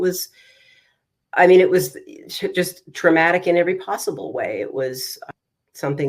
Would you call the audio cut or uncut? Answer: cut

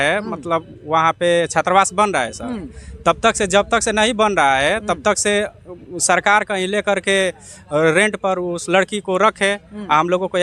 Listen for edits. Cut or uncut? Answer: uncut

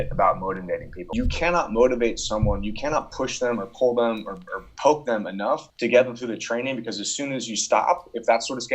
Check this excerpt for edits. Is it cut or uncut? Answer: cut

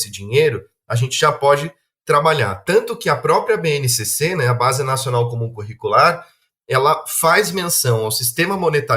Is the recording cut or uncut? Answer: uncut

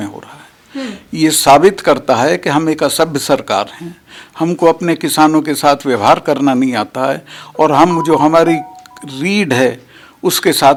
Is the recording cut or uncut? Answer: uncut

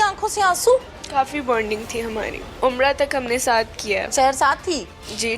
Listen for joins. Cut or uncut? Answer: cut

